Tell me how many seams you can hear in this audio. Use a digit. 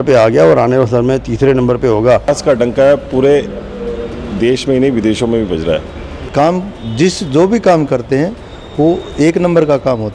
2